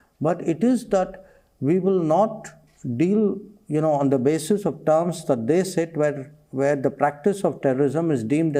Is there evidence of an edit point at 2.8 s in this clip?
no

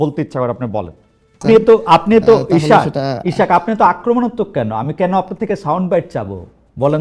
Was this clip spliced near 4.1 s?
no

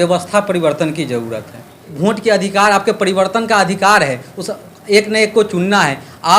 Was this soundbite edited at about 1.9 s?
yes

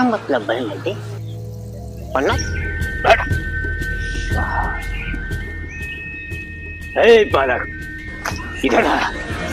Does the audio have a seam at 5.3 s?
no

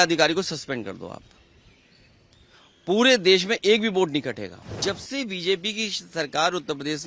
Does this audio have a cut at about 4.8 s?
yes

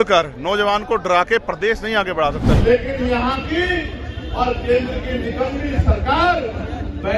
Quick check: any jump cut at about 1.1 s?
no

